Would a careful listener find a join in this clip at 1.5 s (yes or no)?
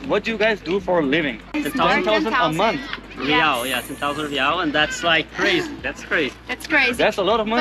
yes